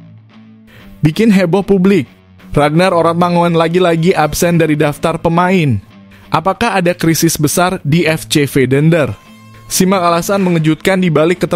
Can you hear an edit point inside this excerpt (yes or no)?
yes